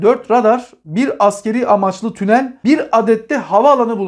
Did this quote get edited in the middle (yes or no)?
yes